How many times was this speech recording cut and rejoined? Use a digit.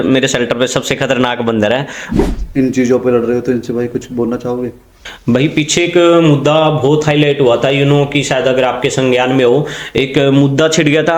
1